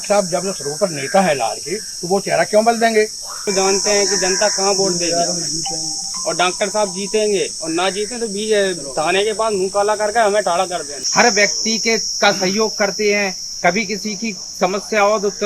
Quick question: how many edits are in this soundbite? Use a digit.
2